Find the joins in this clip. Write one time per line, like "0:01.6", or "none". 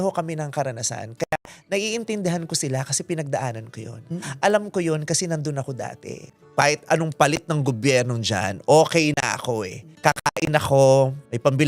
0:06.4